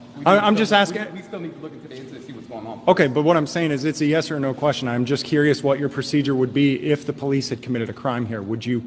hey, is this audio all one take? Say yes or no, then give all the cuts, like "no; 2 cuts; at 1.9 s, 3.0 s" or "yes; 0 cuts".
yes; 0 cuts